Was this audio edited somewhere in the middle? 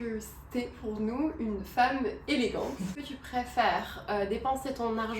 yes; 1 cut; at 2.9 s

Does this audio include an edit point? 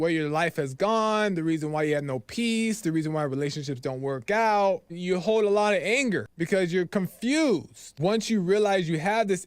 yes; 3 cuts; at 4.9 s, 6.3 s, 7.8 s

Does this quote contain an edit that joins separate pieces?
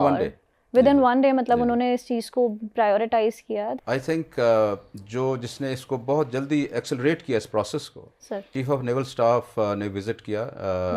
yes; 1 cut; at 3.8 s

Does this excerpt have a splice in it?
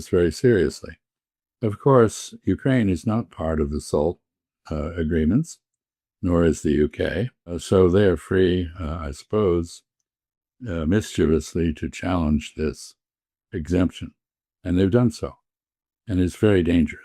yes; 1 cut; at 7.6 s

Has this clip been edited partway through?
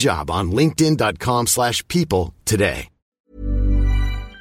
yes; 1 cut; at 3.2 s

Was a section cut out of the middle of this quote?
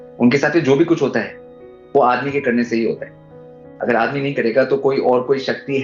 no; 0 cuts

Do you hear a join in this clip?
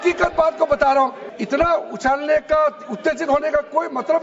yes; 1 cut; at 1.3 s

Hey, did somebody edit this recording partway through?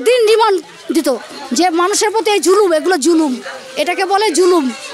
no; 0 cuts

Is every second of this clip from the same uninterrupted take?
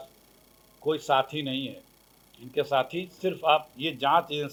yes; 0 cuts

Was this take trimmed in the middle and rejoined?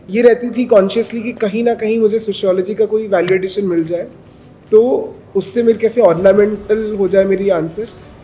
no; 0 cuts

